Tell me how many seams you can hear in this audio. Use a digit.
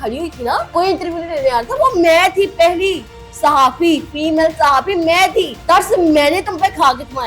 2